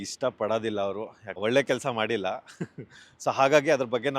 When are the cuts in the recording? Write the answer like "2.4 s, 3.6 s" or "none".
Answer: 1.2 s